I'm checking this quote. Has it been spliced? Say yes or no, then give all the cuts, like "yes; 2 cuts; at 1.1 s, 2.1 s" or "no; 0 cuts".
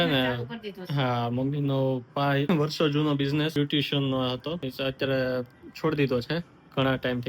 yes; 3 cuts; at 2.5 s, 3.5 s, 4.6 s